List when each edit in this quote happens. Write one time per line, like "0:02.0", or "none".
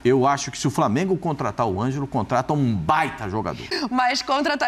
0:03.7